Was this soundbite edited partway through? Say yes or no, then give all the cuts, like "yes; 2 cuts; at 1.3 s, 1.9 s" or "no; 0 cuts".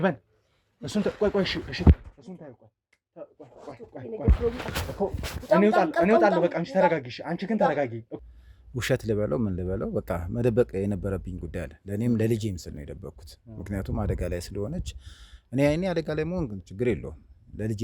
yes; 1 cut; at 8.0 s